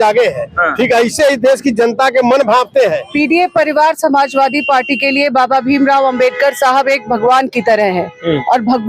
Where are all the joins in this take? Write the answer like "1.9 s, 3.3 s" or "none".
3.0 s